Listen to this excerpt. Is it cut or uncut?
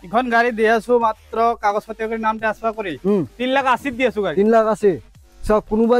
uncut